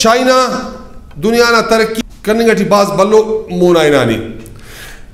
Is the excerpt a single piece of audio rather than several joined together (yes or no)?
no